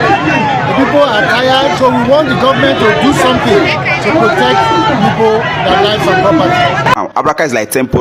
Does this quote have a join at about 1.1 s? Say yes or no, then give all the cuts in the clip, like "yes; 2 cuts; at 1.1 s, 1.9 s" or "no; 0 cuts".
no; 1 cut; at 6.9 s